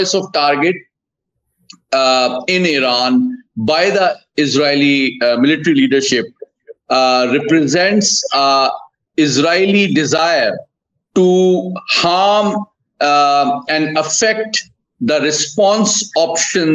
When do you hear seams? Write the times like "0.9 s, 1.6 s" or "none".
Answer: none

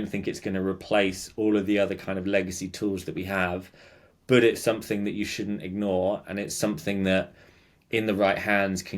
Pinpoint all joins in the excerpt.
none

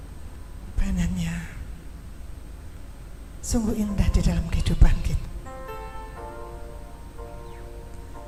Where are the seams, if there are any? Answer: none

